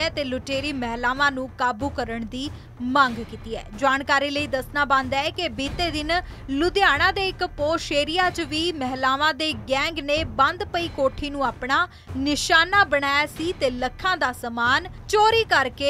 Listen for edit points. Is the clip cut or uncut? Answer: uncut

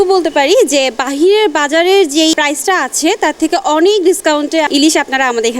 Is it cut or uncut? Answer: cut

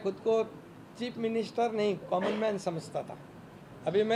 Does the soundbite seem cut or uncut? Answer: uncut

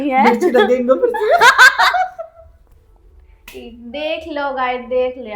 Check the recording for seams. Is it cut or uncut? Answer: uncut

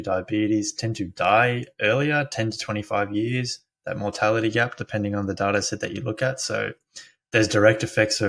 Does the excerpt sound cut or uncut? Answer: uncut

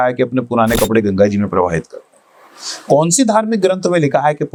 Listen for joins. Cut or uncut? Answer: uncut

